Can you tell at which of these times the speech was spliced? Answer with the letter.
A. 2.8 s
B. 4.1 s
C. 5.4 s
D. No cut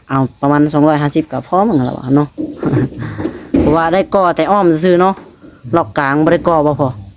D